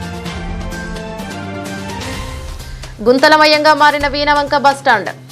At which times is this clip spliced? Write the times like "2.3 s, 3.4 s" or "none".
1.9 s